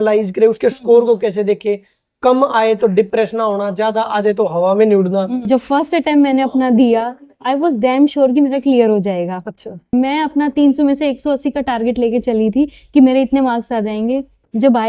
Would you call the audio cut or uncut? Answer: cut